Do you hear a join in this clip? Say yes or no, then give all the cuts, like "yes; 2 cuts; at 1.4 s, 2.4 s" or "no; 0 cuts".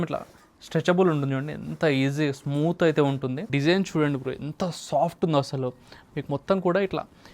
yes; 1 cut; at 3.5 s